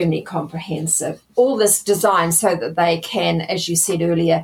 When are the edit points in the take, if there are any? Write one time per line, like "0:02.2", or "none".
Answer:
0:01.2